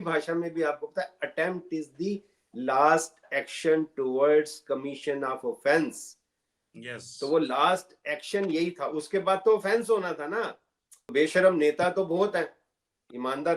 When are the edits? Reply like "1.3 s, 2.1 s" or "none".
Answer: 11.1 s

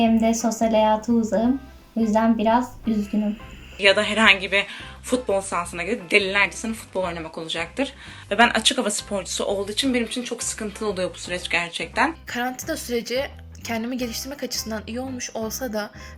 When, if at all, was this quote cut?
3.7 s, 8.1 s, 12.2 s

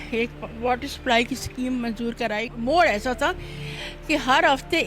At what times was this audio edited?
2.5 s

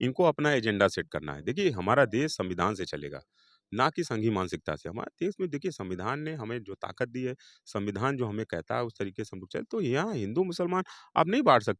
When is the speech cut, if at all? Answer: none

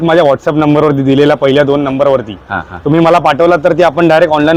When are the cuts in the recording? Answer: none

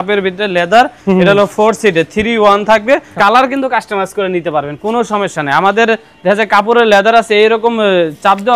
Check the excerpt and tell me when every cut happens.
3.1 s

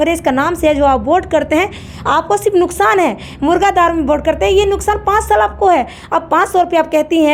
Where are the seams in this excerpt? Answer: none

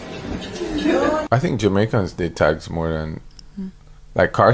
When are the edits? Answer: 1.2 s

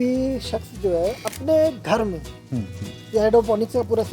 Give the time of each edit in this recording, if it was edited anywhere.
none

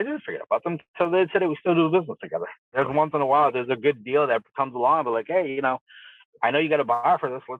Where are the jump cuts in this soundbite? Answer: 2.8 s

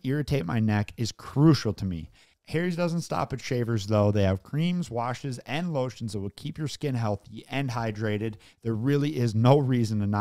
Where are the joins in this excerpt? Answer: 2.3 s

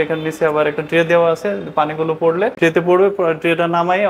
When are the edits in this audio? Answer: 2.5 s

